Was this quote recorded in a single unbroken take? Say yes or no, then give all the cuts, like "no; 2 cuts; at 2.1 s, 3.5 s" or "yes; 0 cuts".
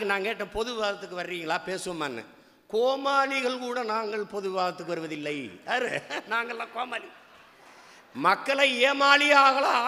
yes; 0 cuts